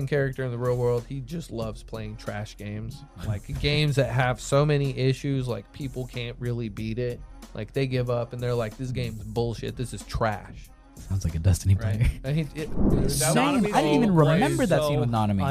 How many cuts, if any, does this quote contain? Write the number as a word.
two